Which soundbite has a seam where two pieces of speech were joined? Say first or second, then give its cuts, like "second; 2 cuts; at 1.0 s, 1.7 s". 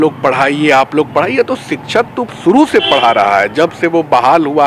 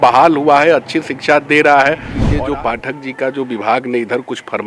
second; 1 cut; at 2.2 s